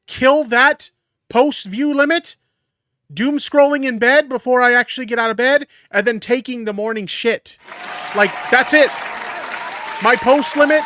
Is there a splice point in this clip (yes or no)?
no